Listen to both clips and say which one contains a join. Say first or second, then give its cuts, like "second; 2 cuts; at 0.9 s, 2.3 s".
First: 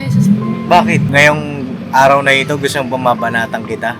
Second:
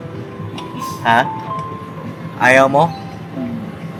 first; 1 cut; at 1.1 s